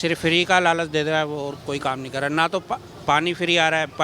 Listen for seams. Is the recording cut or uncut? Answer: uncut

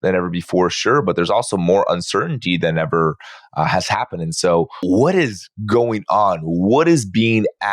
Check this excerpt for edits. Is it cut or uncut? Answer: cut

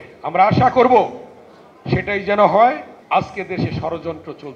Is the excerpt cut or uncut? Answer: cut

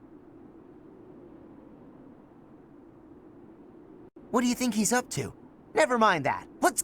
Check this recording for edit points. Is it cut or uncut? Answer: cut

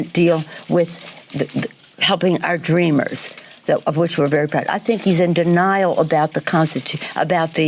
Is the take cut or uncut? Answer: cut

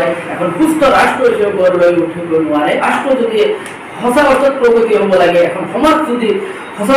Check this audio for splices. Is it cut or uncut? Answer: cut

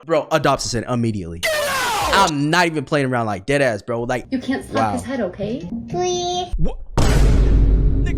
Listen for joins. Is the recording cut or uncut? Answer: cut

